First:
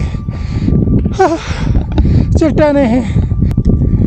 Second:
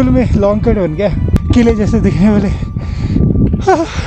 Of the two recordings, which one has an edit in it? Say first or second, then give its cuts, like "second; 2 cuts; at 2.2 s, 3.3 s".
second; 1 cut; at 1.3 s